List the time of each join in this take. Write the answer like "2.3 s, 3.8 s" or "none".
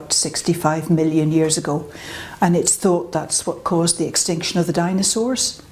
none